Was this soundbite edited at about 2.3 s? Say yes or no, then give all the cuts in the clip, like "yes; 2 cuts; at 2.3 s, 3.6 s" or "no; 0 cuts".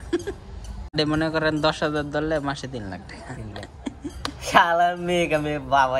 no; 1 cut; at 0.9 s